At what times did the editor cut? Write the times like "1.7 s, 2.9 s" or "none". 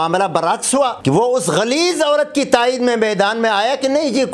1.0 s